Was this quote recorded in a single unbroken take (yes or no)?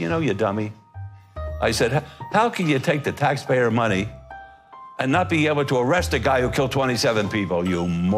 yes